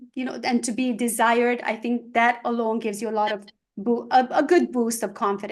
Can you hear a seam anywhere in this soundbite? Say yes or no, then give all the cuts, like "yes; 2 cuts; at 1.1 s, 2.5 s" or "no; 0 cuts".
no; 0 cuts